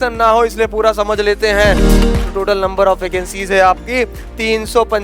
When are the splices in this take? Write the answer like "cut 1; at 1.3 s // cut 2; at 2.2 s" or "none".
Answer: cut 1; at 2.0 s